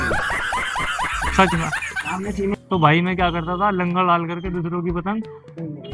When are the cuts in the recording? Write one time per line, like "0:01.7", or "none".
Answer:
0:02.5